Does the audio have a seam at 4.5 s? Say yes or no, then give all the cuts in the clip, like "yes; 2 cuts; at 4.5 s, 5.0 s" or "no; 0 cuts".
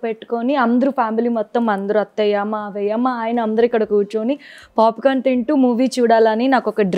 no; 0 cuts